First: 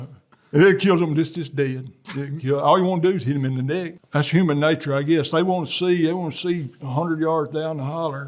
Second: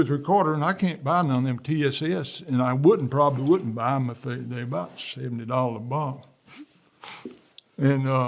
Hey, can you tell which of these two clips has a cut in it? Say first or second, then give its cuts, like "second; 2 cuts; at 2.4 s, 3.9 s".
first; 1 cut; at 4.0 s